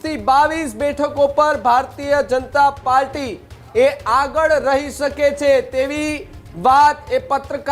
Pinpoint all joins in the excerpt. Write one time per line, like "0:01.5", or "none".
none